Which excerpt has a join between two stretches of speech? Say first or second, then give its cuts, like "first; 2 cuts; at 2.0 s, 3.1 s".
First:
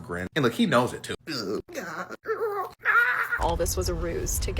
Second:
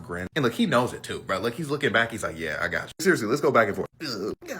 first; 2 cuts; at 1.2 s, 3.3 s